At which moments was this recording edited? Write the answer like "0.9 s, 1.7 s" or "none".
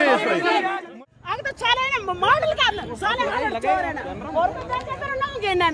1.0 s